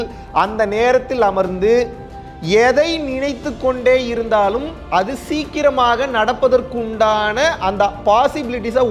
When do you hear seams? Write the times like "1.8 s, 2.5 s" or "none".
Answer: none